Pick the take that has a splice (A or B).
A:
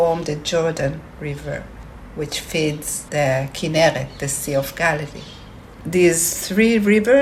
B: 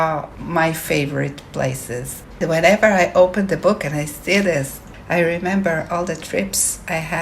B